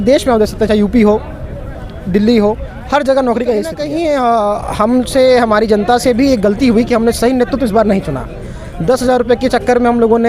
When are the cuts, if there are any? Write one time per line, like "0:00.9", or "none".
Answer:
0:03.8